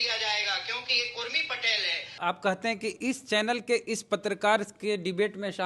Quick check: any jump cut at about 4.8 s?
no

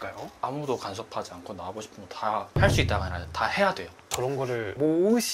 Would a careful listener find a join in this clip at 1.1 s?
no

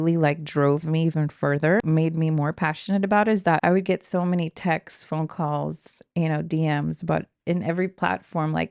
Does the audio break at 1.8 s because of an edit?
yes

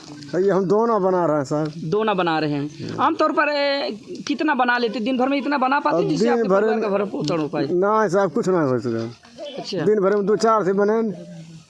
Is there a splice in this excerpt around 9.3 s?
no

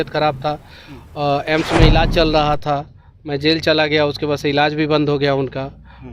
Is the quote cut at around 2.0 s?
no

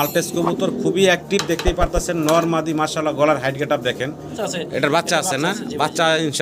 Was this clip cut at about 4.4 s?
yes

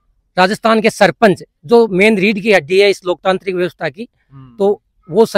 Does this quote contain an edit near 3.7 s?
no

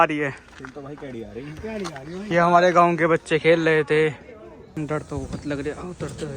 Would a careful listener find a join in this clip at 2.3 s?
yes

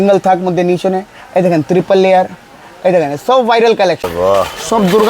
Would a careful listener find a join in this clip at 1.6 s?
no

